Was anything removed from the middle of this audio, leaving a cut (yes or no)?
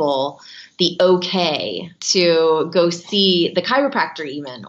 yes